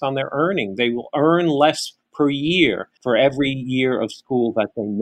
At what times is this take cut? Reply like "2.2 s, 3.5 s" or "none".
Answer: 2.9 s